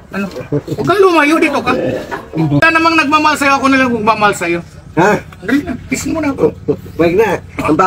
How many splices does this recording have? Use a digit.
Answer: 1